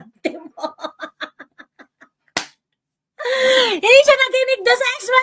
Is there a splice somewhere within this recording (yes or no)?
no